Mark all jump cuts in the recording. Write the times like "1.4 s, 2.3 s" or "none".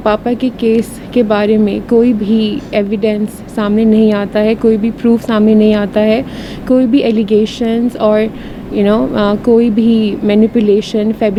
none